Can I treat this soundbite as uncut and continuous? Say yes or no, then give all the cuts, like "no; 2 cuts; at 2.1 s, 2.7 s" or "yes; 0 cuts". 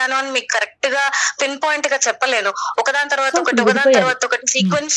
yes; 0 cuts